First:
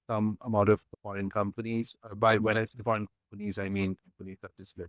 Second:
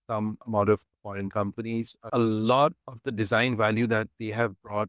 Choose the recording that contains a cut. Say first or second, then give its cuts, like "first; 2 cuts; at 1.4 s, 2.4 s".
second; 1 cut; at 2.1 s